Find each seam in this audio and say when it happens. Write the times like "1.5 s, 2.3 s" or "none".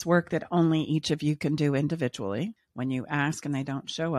2.6 s